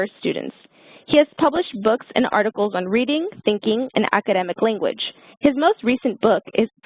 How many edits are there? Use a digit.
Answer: 1